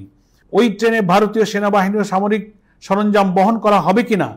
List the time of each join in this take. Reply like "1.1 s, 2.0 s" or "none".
none